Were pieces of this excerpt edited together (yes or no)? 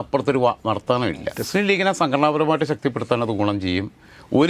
yes